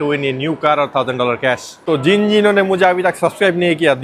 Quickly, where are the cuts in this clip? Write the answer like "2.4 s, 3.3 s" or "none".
1.9 s